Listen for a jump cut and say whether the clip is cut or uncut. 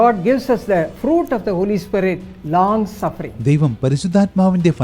uncut